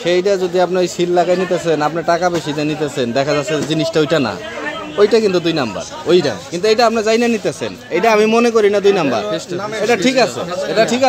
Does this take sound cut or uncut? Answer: uncut